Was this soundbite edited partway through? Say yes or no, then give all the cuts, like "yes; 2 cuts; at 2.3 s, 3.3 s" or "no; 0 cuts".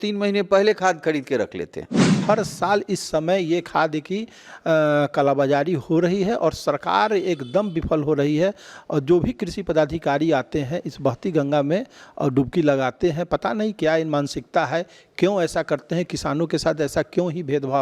yes; 1 cut; at 2.2 s